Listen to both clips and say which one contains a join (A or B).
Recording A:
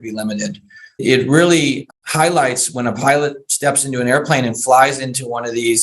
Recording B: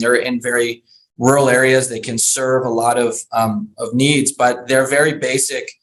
A